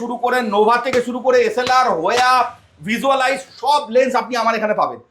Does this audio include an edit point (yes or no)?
no